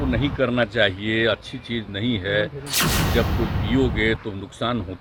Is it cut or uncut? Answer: uncut